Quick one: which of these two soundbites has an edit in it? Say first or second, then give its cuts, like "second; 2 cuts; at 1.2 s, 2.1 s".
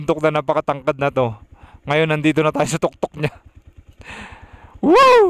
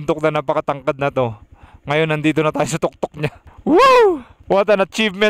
second; 2 cuts; at 3.5 s, 4.3 s